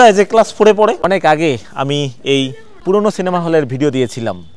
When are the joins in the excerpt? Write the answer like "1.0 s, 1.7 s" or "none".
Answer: 1.0 s, 2.7 s